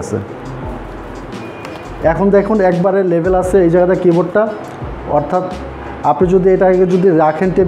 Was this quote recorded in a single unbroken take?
yes; 0 cuts

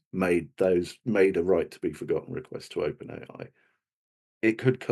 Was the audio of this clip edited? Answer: no; 0 cuts

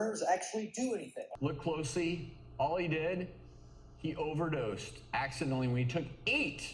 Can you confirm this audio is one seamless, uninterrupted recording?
no; 1 cut; at 1.2 s

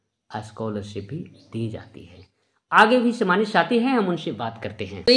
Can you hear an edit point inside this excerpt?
no; 0 cuts

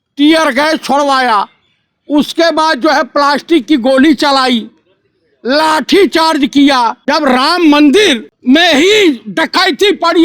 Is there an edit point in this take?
yes; 2 cuts; at 7.0 s, 8.3 s

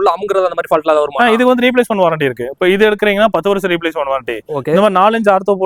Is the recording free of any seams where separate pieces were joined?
yes; 0 cuts

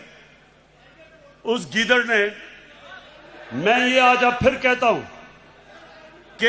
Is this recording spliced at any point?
no; 0 cuts

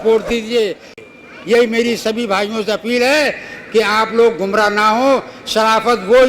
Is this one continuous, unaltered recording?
no; 1 cut; at 0.9 s

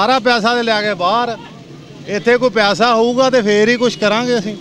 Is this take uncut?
yes; 0 cuts

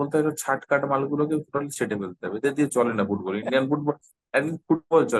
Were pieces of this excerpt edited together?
no; 0 cuts

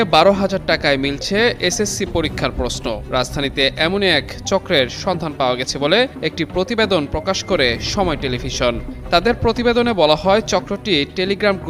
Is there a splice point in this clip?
no; 0 cuts

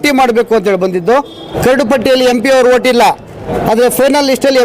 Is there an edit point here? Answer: yes; 2 cuts; at 1.5 s, 3.5 s

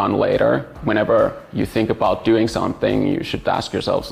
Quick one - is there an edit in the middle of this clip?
no; 0 cuts

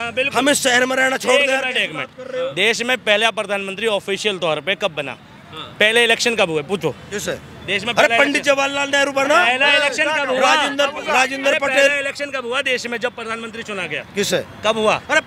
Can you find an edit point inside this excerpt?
no; 0 cuts

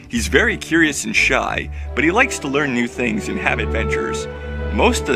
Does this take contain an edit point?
no; 0 cuts

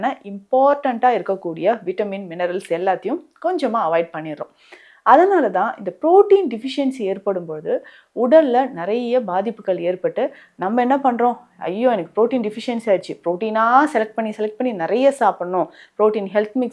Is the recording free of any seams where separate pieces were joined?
yes; 0 cuts

